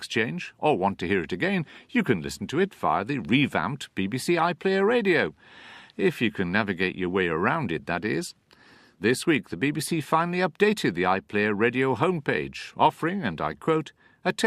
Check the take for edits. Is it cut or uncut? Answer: uncut